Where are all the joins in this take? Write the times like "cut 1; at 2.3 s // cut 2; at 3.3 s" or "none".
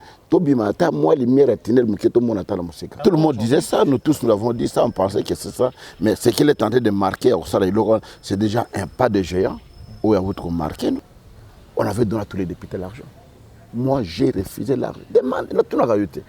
cut 1; at 3.0 s // cut 2; at 11.0 s